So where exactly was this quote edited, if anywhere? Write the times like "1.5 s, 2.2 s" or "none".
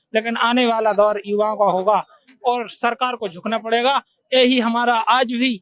none